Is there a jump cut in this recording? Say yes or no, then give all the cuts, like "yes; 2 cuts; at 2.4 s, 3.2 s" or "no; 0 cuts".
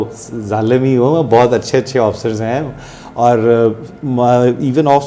no; 0 cuts